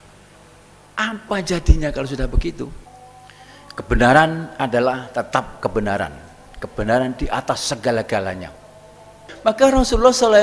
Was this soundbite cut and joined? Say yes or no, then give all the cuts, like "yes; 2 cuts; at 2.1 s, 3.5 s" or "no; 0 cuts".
yes; 2 cuts; at 2.8 s, 9.3 s